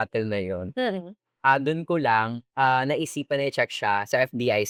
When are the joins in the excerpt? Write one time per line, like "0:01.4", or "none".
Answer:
none